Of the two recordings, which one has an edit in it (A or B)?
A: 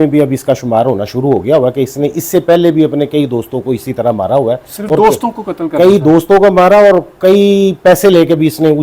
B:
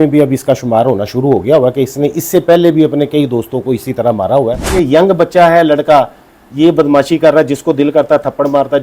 B